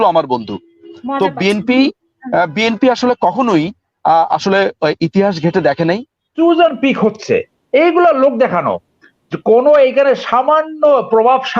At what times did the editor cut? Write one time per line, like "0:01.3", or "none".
0:06.3